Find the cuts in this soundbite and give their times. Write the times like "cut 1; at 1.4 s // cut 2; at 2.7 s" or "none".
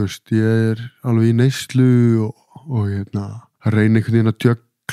cut 1; at 3.4 s